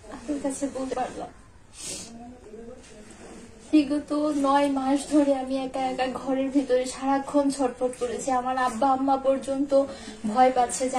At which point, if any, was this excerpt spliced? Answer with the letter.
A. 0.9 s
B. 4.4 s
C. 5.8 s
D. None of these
A